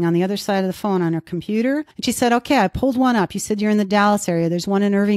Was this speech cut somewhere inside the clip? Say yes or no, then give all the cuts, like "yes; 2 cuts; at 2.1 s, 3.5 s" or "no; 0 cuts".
yes; 1 cut; at 1.9 s